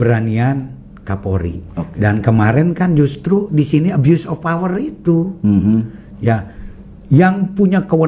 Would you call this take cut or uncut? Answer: uncut